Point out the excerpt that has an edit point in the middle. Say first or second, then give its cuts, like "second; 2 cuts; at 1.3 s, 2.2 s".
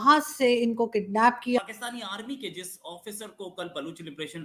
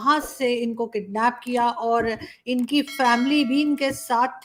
first; 1 cut; at 1.6 s